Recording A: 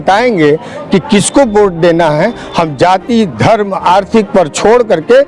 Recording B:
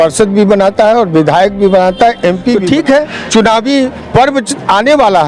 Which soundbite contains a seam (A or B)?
B